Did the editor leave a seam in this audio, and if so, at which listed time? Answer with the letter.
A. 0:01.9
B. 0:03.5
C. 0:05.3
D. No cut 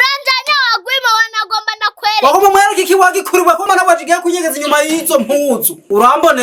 D